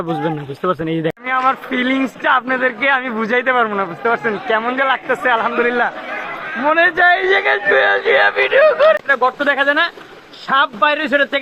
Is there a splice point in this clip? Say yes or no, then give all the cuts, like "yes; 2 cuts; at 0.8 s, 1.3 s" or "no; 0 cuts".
yes; 2 cuts; at 1.2 s, 9.0 s